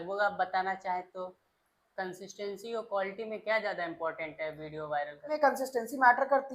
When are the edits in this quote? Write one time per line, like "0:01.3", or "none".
0:01.4
0:05.4